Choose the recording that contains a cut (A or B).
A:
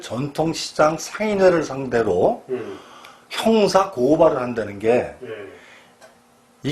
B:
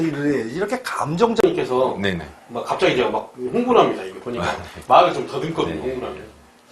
B